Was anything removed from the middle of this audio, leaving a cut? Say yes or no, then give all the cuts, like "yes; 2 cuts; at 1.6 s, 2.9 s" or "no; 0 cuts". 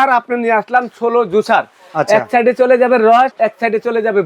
yes; 1 cut; at 3.3 s